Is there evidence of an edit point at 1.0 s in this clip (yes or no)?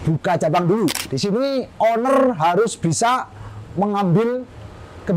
yes